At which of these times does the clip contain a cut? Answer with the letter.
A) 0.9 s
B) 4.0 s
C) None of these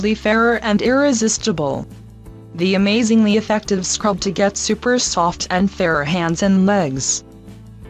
B